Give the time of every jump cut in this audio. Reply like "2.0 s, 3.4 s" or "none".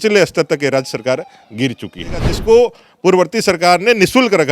2.3 s